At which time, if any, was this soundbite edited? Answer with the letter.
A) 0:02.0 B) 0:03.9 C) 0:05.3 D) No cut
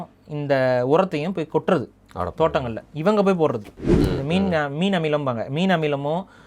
B